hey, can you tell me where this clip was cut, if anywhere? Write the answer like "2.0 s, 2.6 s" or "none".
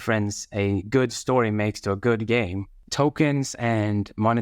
2.8 s